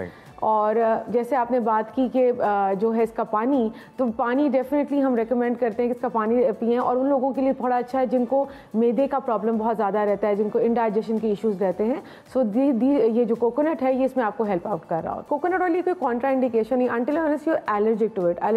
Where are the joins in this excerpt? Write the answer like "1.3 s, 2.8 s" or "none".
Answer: 15.3 s